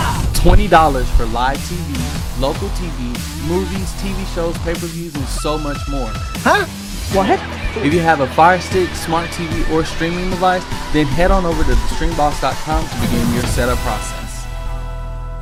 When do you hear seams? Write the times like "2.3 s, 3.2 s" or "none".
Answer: none